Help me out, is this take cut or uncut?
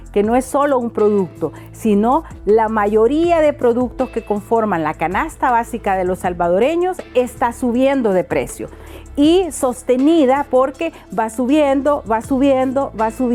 uncut